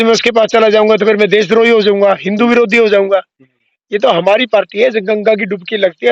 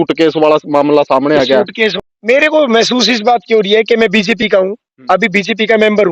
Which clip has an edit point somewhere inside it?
second; 1 cut; at 1.9 s

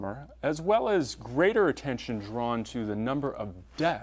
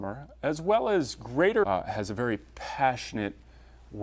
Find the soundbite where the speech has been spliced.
first; 1 cut; at 1.6 s

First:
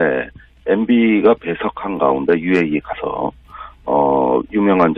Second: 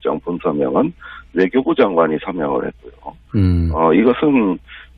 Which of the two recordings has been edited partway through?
second; 1 cut; at 2.1 s

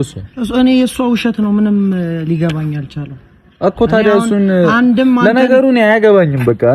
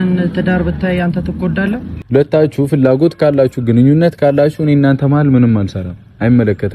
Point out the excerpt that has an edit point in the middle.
second; 1 cut; at 1.9 s

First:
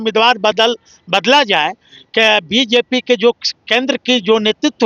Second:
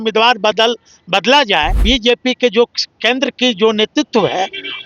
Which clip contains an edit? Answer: second; 1 cut; at 1.8 s

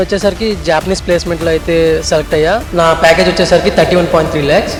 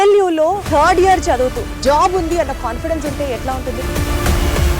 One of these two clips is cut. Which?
second; 1 cut; at 3.8 s

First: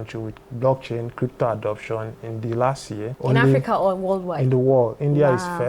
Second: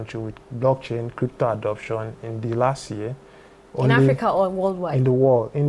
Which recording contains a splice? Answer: first; 1 cut; at 3.1 s

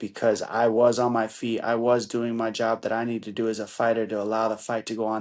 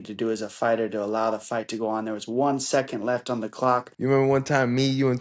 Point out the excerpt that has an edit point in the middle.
second; 1 cut; at 3.9 s

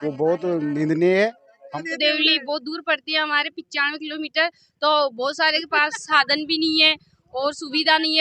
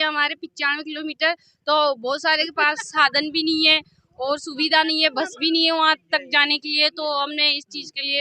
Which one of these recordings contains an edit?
first; 1 cut; at 1.6 s

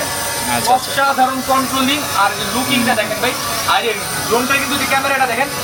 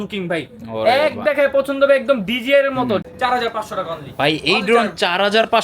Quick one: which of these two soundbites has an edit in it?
second; 1 cut; at 3.1 s

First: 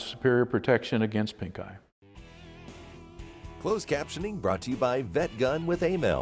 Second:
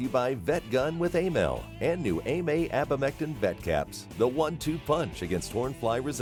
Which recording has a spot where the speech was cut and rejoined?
first; 2 cuts; at 2.1 s, 3.6 s

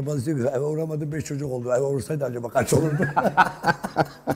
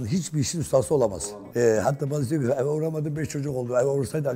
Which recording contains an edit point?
second; 1 cut; at 1.1 s

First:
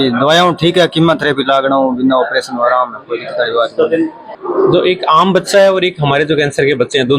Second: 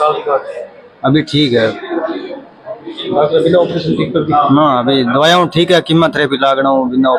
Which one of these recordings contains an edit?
first; 1 cut; at 4.3 s

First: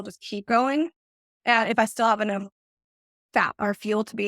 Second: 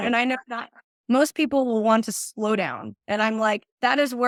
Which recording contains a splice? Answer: first; 1 cut; at 1.9 s

